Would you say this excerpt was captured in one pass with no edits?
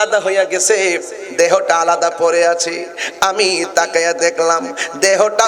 yes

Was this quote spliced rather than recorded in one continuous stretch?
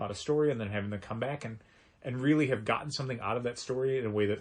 no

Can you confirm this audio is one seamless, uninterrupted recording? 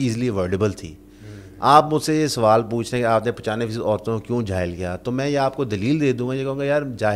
yes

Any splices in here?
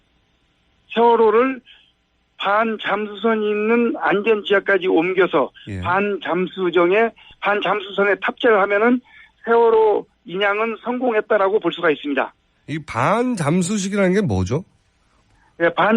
yes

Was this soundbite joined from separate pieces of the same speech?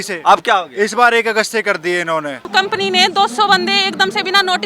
yes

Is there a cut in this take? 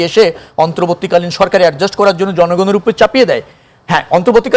no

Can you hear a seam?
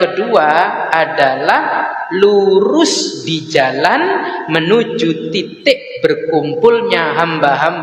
no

